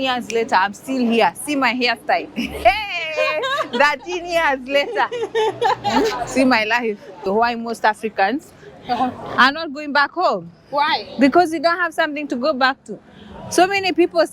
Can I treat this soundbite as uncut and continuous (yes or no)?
no